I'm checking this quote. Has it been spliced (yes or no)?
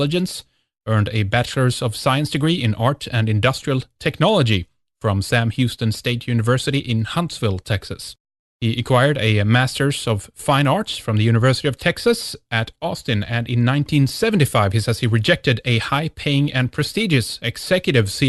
no